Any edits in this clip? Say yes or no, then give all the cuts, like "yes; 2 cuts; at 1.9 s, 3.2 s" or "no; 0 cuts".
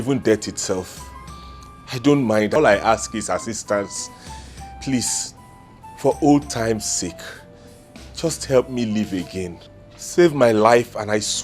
yes; 1 cut; at 2.5 s